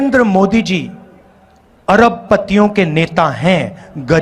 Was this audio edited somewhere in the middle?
no; 0 cuts

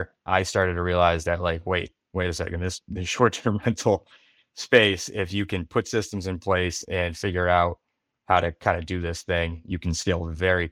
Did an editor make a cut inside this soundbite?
no; 0 cuts

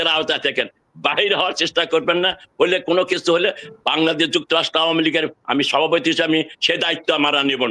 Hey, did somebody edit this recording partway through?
no; 0 cuts

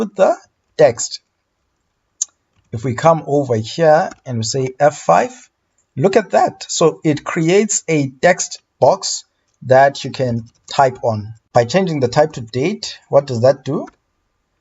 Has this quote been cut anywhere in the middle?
yes; 1 cut; at 11.3 s

